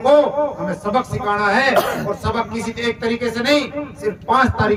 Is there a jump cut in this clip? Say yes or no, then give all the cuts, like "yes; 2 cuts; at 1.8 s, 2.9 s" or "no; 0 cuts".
no; 0 cuts